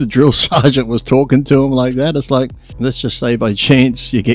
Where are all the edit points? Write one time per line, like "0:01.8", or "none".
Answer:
0:02.6